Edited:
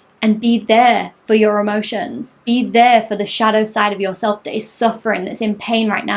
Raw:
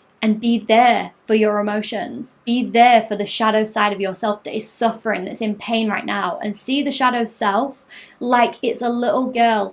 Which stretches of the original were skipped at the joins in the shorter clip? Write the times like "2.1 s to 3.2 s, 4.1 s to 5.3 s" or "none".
none